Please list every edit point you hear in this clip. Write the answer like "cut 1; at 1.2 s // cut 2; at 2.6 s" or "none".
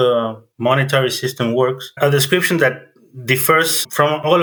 none